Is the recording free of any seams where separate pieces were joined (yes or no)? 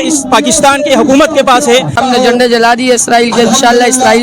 no